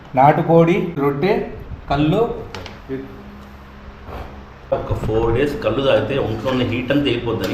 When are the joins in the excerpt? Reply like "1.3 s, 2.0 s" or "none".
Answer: 0.9 s, 4.7 s